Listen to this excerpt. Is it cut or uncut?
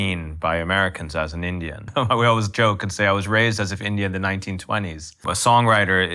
cut